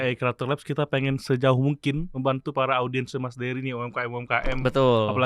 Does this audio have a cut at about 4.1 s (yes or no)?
no